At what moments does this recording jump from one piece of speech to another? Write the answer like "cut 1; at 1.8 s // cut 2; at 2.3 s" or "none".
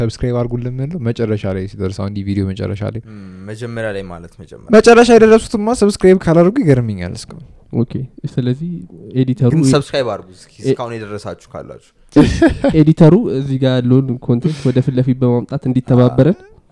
none

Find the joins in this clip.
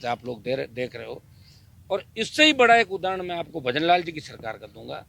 none

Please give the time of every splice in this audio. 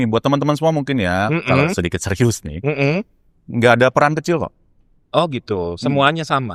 none

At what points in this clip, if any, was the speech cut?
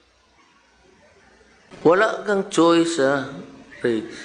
cut 1; at 1.7 s

